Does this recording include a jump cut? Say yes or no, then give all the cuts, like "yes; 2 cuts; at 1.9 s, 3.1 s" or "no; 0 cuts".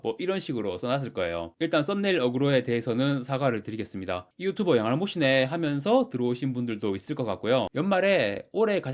yes; 1 cut; at 7.7 s